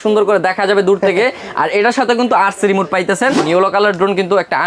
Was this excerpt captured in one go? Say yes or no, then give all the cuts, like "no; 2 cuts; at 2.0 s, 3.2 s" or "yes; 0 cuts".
no; 1 cut; at 3.4 s